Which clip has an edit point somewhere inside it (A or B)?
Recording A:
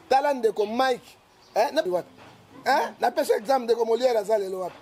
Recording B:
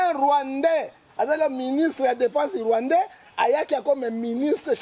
A